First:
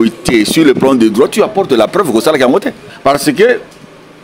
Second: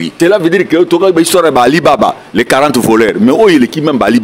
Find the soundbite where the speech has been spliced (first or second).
first